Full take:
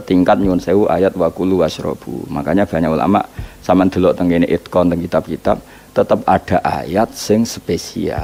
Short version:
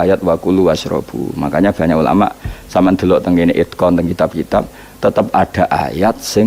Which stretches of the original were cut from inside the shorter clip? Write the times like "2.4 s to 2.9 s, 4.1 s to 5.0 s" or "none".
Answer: none